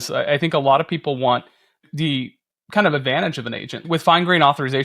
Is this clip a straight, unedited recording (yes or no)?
no